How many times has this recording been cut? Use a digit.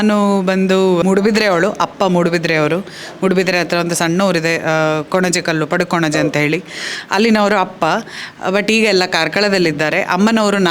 1